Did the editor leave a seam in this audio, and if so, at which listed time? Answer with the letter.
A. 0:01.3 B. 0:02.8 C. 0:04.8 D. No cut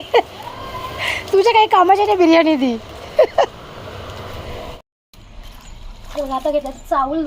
C